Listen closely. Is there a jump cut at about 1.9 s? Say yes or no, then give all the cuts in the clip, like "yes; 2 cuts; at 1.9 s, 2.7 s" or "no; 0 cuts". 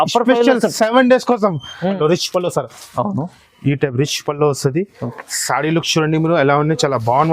yes; 1 cut; at 1.9 s